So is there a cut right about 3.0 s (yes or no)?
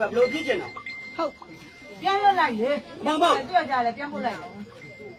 no